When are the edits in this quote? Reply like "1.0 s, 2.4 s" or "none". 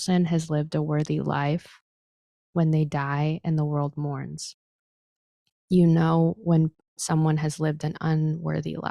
none